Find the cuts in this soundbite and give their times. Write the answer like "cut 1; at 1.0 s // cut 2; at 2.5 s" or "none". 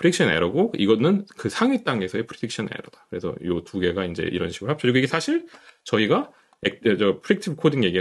none